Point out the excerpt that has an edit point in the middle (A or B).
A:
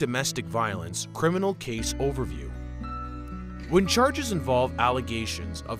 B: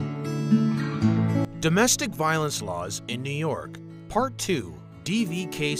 B